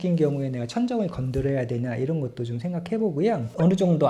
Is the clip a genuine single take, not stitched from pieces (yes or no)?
yes